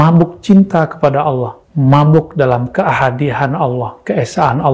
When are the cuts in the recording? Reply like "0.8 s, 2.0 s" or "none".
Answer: none